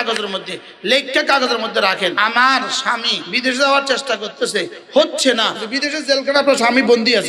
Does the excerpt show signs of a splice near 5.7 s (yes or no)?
yes